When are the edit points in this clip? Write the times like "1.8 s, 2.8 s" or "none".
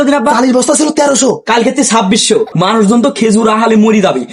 2.5 s